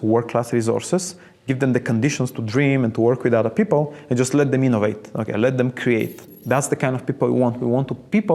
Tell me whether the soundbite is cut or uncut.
cut